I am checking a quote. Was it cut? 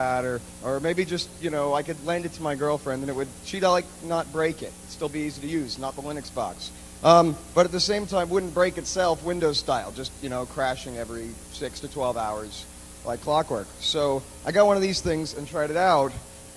yes; 1 cut; at 6.4 s

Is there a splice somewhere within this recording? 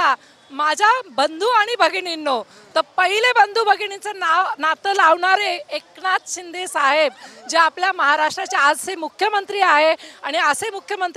no; 0 cuts

